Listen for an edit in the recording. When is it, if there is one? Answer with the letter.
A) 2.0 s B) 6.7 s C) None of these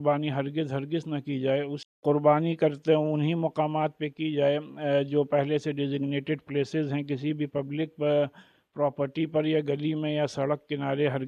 A